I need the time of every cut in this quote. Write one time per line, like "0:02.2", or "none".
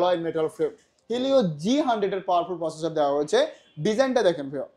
0:01.0